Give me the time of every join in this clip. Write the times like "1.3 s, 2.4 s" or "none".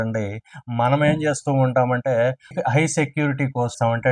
none